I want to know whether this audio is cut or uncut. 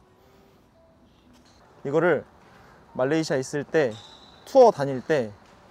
cut